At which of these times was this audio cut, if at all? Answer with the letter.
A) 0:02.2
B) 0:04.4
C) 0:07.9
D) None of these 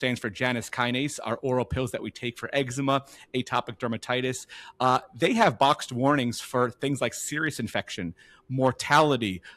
D